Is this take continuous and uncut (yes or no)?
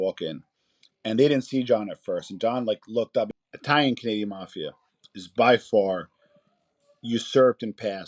no